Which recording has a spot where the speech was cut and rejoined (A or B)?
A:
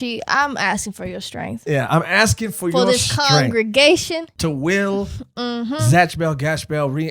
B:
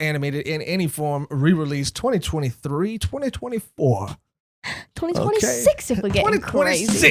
A